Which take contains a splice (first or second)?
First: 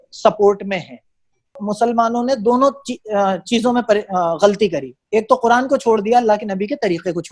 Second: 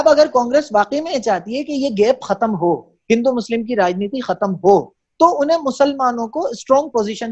first